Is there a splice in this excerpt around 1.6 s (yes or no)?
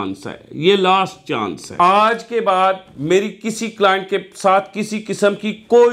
yes